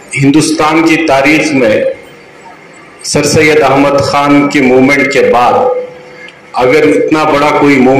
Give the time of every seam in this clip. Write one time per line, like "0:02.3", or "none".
none